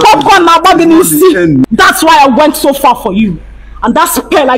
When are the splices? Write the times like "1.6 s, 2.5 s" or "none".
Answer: 1.6 s